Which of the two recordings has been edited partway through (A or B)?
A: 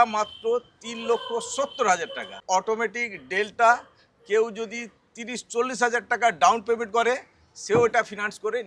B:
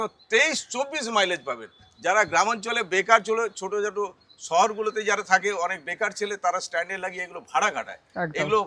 A